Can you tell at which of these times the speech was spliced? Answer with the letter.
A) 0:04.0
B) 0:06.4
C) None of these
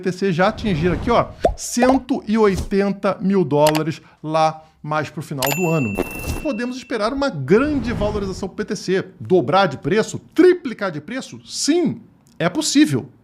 B